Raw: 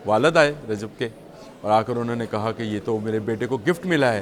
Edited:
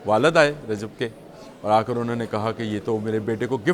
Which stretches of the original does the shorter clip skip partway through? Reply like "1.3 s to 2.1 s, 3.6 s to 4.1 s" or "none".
none